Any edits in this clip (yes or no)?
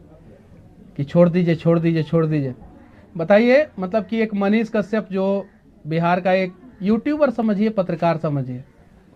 no